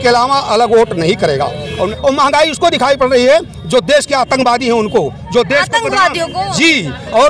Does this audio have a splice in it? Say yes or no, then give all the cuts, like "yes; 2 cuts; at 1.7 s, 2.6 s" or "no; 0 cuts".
yes; 1 cut; at 1.9 s